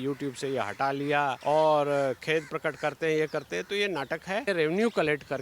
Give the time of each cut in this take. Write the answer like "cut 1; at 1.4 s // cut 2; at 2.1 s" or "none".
cut 1; at 1.4 s // cut 2; at 4.5 s